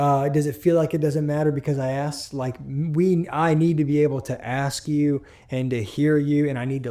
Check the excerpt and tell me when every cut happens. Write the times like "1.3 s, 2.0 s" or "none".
none